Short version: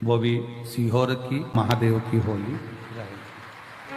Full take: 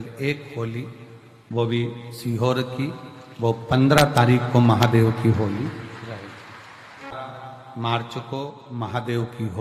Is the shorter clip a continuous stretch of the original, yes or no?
no